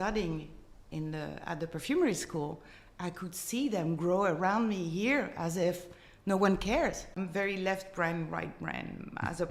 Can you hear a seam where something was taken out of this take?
yes; 1 cut; at 7.1 s

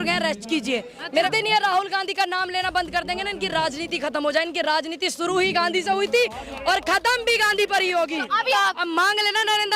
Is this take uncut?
no; 2 cuts; at 1.3 s, 8.5 s

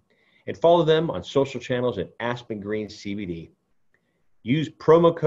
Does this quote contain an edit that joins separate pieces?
no; 0 cuts

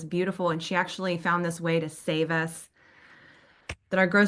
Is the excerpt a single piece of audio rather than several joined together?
yes; 0 cuts

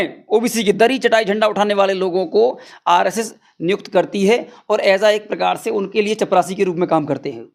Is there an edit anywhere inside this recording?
no; 0 cuts

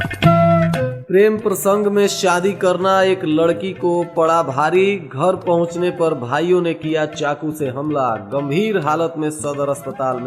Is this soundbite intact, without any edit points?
no; 1 cut; at 1.0 s

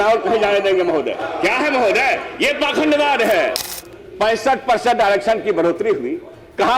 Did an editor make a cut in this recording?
yes; 1 cut; at 3.7 s

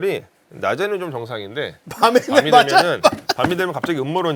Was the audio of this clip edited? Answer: no; 0 cuts

